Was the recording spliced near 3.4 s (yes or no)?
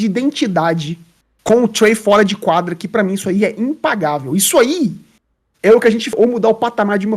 no